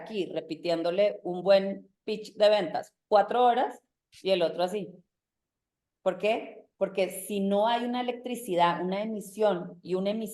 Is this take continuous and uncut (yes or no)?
yes